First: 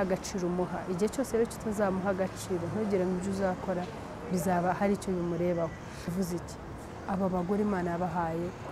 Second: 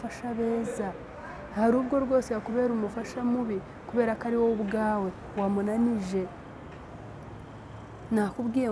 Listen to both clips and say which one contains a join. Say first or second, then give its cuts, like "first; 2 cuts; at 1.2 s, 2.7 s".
first; 1 cut; at 6.1 s